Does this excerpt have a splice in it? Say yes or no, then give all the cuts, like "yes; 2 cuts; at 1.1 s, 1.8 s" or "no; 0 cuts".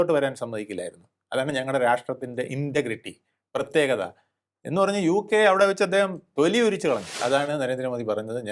yes; 1 cut; at 7.2 s